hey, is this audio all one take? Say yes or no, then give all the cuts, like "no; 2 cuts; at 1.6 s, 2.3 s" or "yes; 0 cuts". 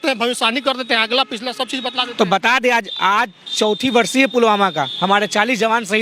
yes; 0 cuts